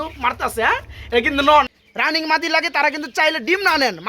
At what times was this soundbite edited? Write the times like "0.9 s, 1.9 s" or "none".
1.7 s